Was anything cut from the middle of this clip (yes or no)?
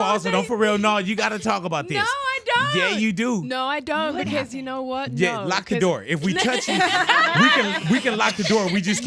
no